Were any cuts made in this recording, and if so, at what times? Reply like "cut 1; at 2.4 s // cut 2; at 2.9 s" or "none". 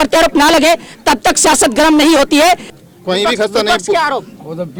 cut 1; at 2.7 s